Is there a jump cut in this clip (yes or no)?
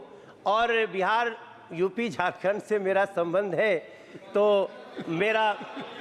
no